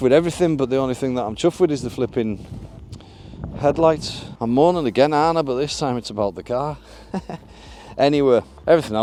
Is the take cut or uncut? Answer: uncut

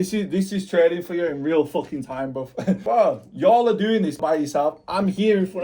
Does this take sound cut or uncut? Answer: cut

